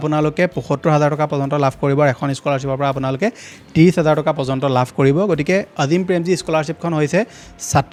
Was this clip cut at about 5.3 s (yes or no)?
no